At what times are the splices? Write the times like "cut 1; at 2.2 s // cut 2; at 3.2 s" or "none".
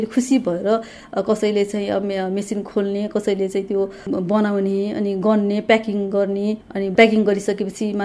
none